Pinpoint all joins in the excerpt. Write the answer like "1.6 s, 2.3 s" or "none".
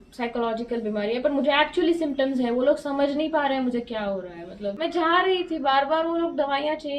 4.8 s